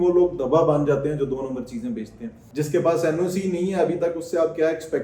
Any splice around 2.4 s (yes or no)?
yes